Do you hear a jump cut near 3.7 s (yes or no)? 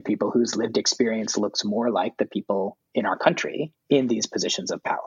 yes